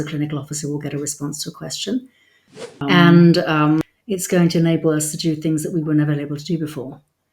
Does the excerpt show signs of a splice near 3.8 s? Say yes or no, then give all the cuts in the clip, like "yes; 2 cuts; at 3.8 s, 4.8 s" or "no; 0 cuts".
yes; 1 cut; at 3.8 s